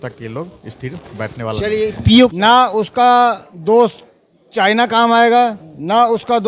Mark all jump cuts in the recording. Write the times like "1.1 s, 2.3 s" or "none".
2.0 s